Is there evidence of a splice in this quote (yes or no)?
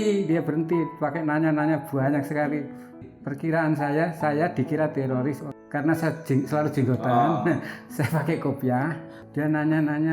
yes